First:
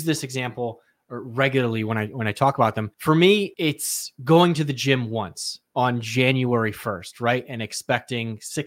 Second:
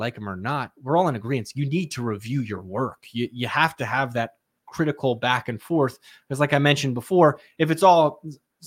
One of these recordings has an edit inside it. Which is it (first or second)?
first